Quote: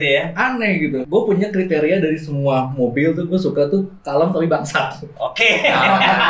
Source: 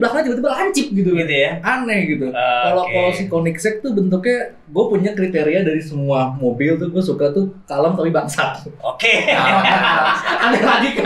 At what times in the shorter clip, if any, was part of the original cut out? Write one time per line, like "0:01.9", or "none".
0:01.0